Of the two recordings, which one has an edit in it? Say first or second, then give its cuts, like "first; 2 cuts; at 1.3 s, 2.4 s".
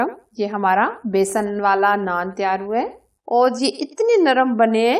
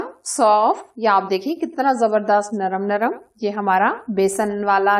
first; 1 cut; at 3.1 s